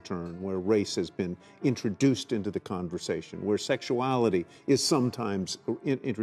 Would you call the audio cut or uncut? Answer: uncut